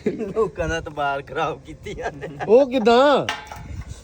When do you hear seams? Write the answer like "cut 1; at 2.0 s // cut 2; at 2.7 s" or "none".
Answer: none